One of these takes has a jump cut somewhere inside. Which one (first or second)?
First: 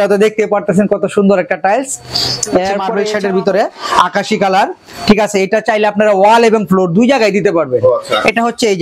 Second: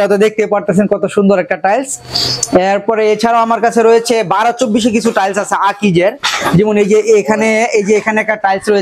first